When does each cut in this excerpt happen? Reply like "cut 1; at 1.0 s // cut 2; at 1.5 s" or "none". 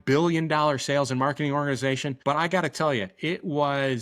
cut 1; at 2.1 s